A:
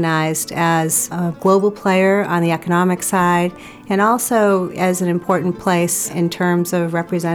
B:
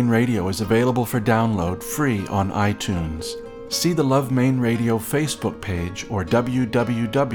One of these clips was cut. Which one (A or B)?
A